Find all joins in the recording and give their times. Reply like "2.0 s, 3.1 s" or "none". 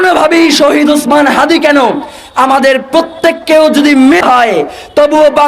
4.2 s